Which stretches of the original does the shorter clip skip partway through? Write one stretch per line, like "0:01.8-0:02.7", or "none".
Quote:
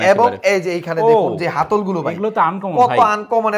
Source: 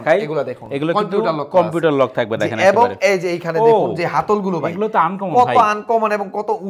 none